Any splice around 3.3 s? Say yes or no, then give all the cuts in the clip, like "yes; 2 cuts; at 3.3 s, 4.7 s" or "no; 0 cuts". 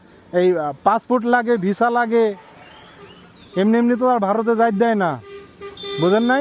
no; 0 cuts